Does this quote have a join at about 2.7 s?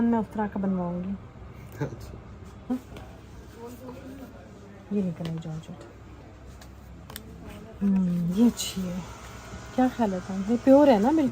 yes; 1 cut; at 2.7 s

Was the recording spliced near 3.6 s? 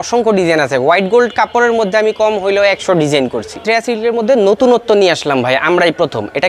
yes; 1 cut; at 3.6 s

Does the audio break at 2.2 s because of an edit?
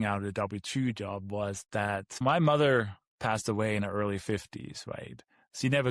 yes; 1 cut; at 2.2 s

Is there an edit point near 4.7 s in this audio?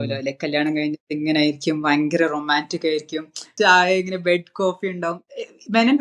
no; 1 cut; at 3.5 s

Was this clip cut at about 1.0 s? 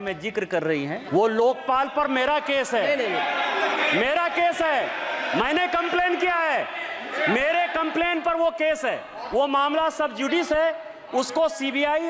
yes; 1 cut; at 1.0 s

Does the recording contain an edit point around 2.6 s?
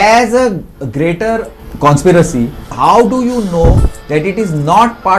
yes; 1 cut; at 2.6 s

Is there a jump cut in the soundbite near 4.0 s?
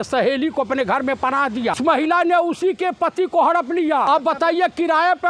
yes; 2 cuts; at 1.8 s, 4.0 s

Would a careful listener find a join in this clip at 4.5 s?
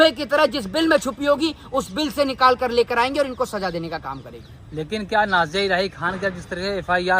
no; 0 cuts

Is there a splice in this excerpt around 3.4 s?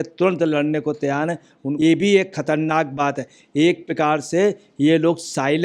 no; 1 cut; at 1.6 s

